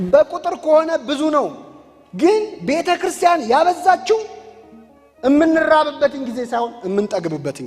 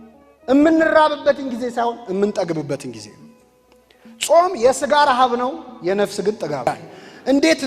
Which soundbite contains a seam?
second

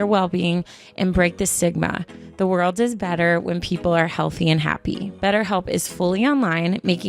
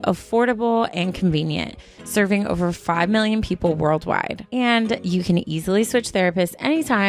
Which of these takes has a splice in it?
first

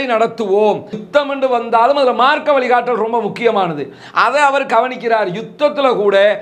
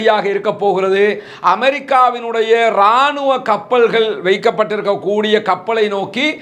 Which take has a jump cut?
first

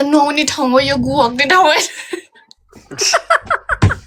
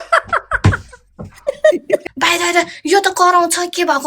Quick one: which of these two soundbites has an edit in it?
second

